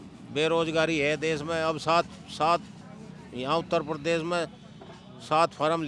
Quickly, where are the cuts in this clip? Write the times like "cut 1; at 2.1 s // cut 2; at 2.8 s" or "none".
none